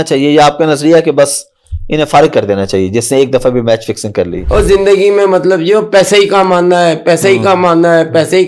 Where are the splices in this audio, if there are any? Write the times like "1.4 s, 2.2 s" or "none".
4.4 s